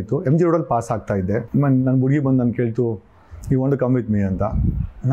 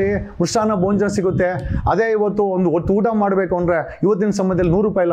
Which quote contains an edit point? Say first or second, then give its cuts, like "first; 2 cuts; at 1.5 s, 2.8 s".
first; 1 cut; at 1.5 s